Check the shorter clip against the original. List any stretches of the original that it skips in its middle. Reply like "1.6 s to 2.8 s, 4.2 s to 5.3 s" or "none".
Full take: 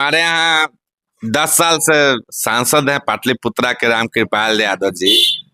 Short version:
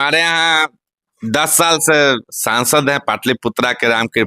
none